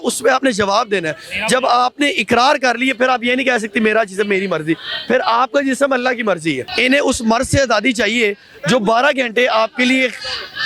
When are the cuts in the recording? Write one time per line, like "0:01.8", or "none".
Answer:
0:06.7